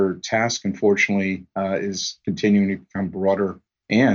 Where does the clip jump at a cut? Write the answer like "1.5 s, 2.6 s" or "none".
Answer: none